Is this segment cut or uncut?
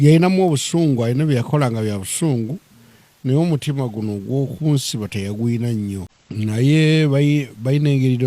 cut